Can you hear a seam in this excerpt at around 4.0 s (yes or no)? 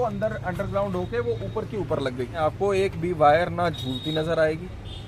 no